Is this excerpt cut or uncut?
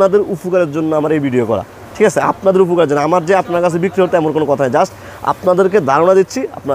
uncut